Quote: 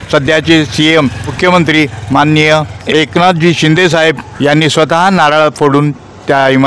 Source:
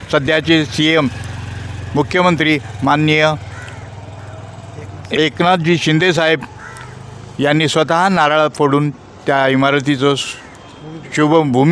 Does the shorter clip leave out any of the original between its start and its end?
yes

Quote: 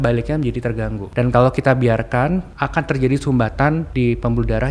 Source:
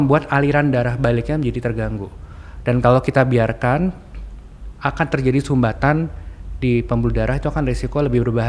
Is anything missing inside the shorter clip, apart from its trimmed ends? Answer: yes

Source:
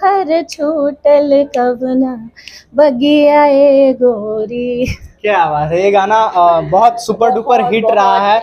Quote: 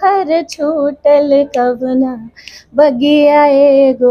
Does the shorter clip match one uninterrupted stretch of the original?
yes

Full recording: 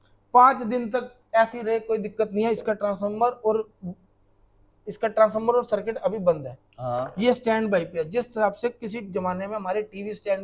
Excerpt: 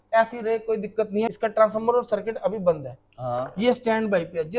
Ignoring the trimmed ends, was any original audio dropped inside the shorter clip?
yes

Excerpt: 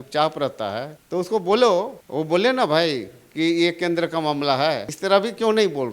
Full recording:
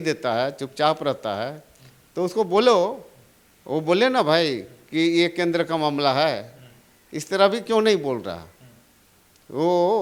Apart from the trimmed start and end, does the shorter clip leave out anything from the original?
yes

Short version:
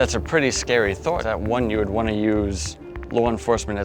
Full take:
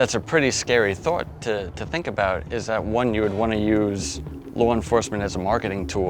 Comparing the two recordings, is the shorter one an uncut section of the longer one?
no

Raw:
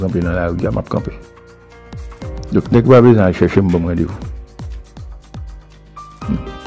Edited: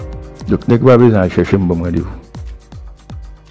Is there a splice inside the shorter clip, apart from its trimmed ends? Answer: yes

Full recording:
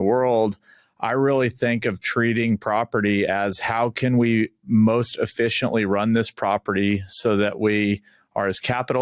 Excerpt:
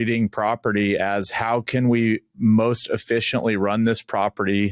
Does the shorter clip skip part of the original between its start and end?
no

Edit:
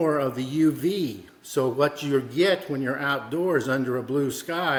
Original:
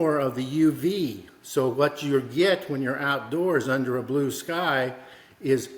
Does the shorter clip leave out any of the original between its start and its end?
no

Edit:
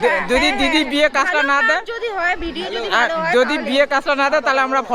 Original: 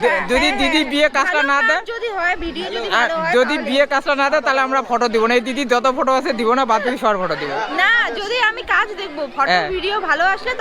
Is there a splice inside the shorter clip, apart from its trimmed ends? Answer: no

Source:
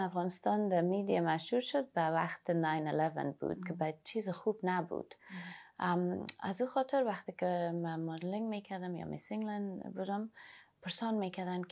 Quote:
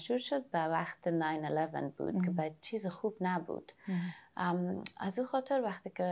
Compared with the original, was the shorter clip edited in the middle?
no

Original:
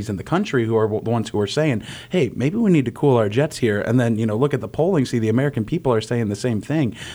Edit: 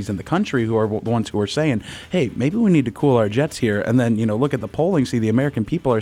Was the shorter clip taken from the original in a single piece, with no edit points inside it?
yes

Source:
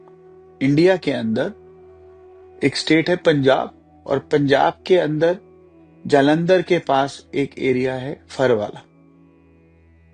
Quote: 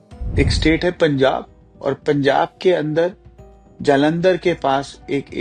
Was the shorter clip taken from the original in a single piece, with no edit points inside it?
yes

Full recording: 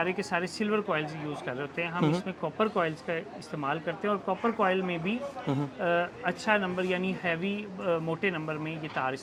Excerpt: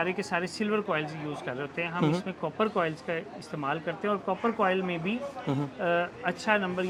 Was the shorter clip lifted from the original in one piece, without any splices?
yes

